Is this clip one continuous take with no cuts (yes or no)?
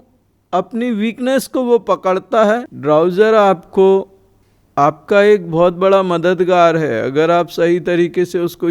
no